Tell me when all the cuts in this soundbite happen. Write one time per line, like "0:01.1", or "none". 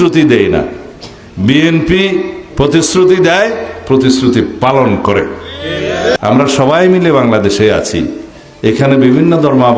0:06.2